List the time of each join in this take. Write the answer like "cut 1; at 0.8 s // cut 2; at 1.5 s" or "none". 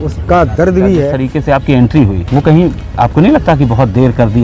cut 1; at 1.2 s // cut 2; at 2.2 s